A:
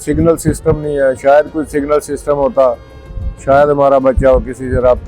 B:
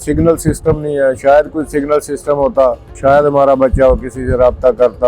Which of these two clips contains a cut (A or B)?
B